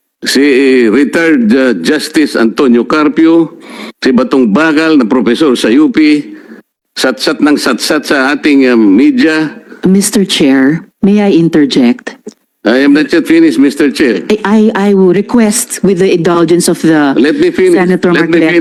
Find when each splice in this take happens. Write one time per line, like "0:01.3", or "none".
none

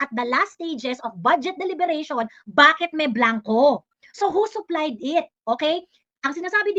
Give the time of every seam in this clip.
none

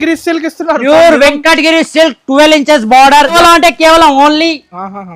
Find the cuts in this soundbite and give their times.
0:03.3

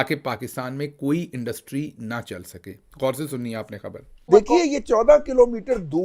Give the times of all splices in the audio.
0:04.2

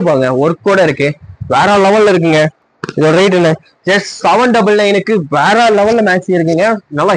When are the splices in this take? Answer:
none

